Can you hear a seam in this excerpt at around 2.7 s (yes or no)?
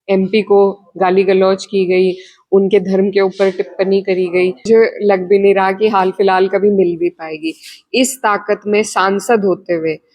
no